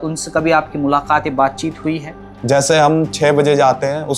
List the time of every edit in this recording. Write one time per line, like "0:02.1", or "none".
0:02.3